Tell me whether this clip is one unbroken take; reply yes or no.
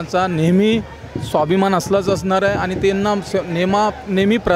yes